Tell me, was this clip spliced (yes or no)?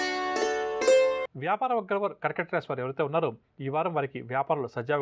yes